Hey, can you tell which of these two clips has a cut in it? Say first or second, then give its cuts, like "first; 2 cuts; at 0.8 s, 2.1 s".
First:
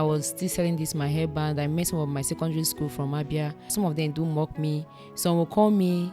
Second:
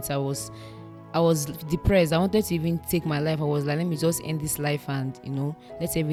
first; 1 cut; at 3.7 s